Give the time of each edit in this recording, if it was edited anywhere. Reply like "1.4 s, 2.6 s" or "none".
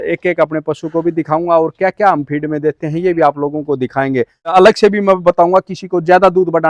4.4 s